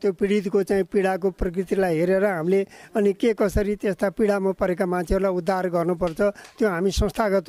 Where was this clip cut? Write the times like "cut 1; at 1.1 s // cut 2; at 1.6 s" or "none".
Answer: none